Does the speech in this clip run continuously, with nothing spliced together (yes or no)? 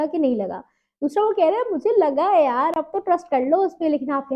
yes